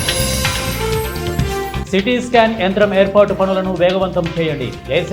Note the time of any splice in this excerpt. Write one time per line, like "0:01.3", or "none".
none

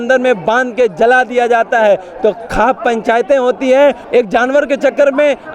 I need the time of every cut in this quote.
0:04.0

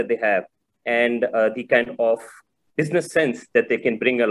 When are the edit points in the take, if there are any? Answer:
0:02.7

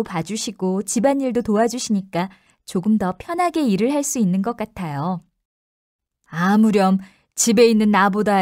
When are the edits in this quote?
0:04.1

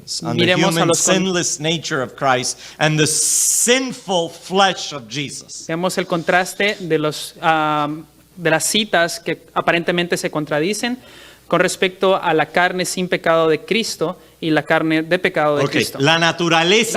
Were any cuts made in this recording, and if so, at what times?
none

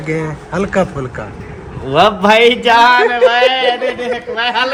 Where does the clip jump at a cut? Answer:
none

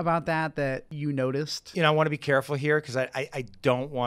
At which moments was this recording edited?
0:00.9
0:01.6

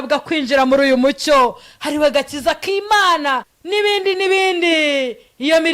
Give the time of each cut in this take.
0:03.5

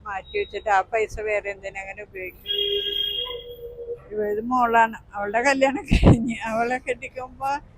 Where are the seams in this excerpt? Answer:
none

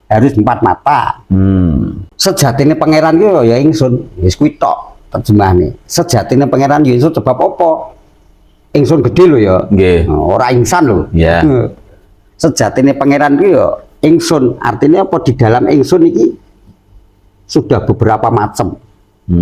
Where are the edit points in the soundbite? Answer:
0:02.0

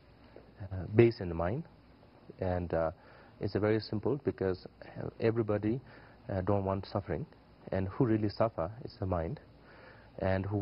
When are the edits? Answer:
0:05.0

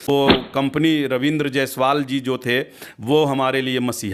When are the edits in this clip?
none

